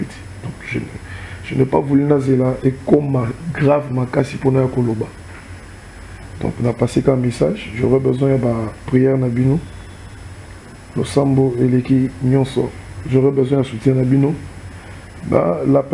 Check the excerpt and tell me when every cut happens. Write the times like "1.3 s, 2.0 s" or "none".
none